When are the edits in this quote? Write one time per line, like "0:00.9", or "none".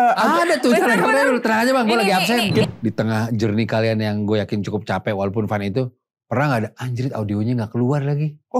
0:02.6